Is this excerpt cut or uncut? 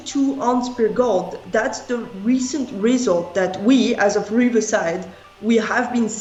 uncut